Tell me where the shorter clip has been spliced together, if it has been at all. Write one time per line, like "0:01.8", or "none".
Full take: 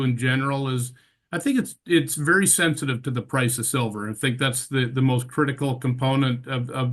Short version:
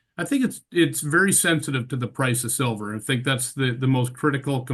none